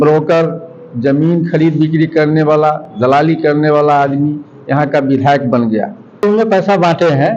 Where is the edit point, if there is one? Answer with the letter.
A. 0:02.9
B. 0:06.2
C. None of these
B